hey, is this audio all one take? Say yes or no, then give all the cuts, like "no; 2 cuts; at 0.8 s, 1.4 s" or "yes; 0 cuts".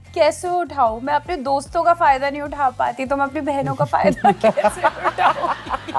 yes; 0 cuts